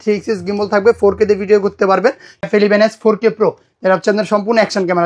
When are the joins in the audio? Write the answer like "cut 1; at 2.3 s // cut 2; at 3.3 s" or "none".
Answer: cut 1; at 2.5 s